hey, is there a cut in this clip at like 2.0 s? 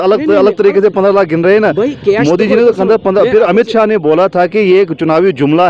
no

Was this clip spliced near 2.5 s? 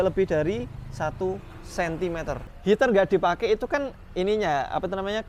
yes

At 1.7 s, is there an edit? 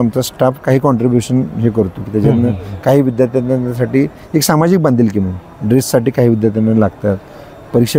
no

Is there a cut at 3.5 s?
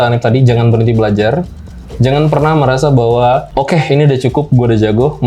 yes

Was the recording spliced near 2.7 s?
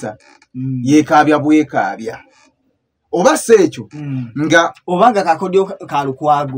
no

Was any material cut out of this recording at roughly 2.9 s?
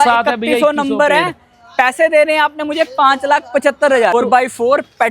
no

